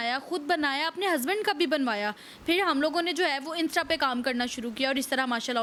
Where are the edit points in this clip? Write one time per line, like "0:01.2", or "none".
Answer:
none